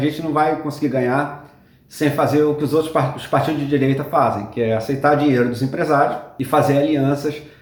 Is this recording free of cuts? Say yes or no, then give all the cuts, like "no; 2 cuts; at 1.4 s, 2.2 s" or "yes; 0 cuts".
yes; 0 cuts